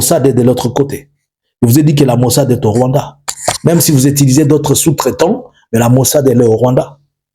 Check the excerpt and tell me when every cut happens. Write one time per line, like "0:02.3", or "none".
none